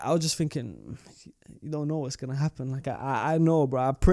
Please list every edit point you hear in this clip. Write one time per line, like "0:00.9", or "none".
none